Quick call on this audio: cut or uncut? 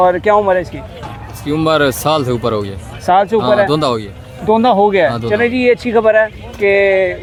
uncut